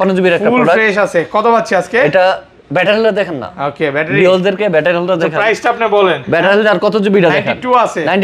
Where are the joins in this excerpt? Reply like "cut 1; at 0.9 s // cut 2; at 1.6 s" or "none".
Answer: none